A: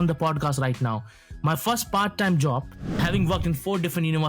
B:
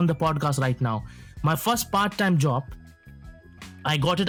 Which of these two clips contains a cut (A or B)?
A